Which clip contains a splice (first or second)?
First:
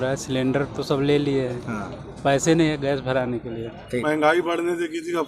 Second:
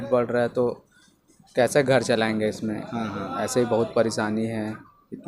first